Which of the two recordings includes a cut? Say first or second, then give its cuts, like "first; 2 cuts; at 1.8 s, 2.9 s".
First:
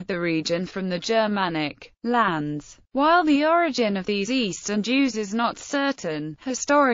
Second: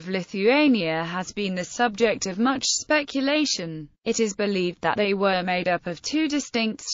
first; 1 cut; at 5.9 s